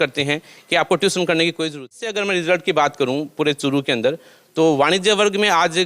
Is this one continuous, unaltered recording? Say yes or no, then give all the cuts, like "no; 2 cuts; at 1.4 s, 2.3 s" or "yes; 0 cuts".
no; 1 cut; at 2.0 s